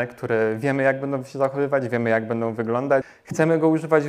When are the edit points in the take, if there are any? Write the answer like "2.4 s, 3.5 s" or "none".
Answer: 3.2 s